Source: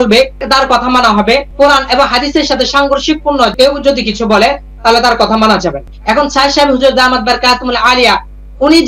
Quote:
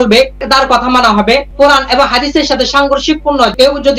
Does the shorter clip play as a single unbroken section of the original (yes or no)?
yes